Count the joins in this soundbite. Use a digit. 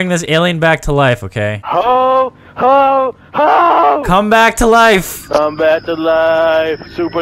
1